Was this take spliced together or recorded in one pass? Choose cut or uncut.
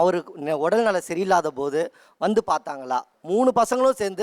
cut